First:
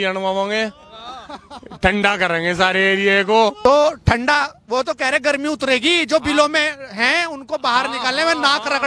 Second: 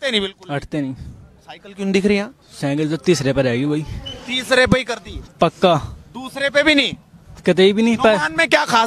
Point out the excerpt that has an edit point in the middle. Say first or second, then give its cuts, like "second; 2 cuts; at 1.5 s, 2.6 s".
first; 1 cut; at 3.6 s